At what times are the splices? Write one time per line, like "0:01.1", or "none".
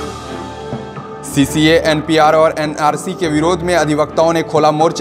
0:01.0